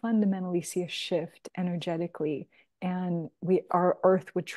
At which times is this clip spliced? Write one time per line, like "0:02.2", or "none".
none